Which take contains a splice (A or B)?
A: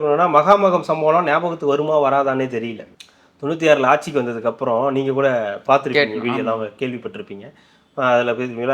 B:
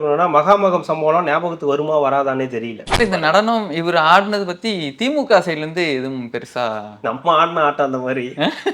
B